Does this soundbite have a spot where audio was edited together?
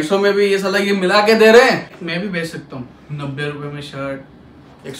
yes; 1 cut; at 1.9 s

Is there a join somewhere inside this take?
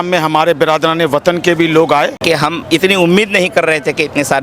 yes; 1 cut; at 2.2 s

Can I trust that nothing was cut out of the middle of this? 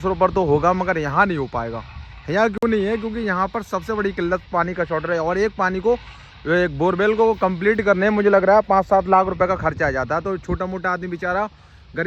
yes; 0 cuts

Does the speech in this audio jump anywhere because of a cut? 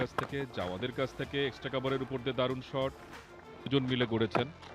yes; 1 cut; at 3.7 s

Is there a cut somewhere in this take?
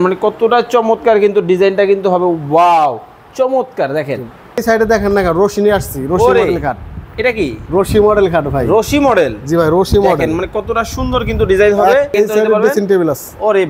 yes; 2 cuts; at 4.6 s, 12.1 s

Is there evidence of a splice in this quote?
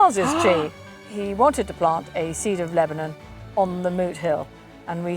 yes; 1 cut; at 0.9 s

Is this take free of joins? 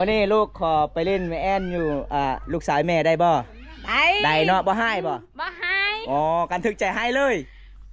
yes; 0 cuts

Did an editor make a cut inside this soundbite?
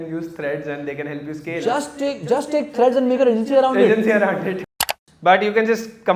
yes; 1 cut; at 4.6 s

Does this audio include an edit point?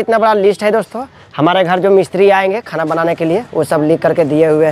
no; 0 cuts

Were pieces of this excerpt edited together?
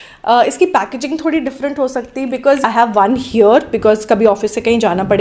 yes; 1 cut; at 2.6 s

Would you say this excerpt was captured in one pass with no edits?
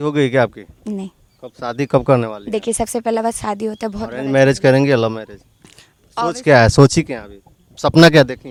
yes; 0 cuts

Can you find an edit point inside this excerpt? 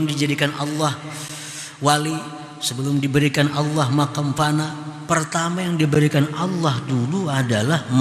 no; 0 cuts

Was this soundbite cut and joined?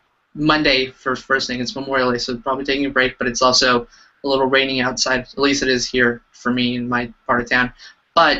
yes; 1 cut; at 6.1 s

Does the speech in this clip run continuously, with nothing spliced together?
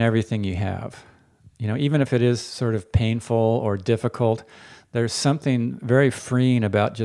yes; 0 cuts

